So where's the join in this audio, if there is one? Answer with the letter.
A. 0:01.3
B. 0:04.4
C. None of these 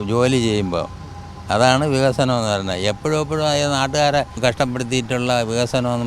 B